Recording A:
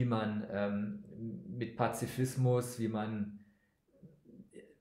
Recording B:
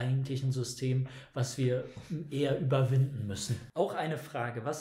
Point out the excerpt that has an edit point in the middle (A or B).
B